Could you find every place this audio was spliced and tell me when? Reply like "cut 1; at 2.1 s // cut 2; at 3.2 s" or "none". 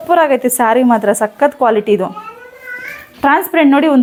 none